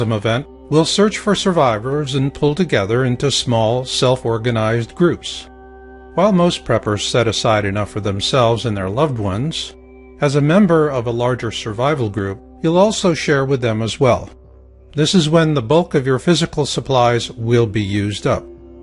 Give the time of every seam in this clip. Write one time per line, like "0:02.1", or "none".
0:11.7